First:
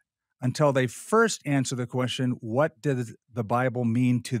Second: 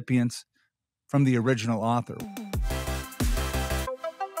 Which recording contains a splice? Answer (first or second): second